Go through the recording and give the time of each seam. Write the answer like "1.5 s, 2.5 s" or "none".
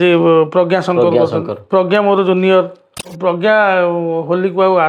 3.1 s